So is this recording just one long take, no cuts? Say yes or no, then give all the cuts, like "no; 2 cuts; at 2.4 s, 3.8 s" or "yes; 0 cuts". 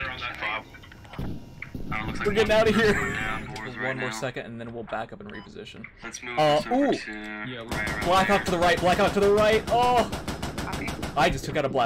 no; 1 cut; at 3.5 s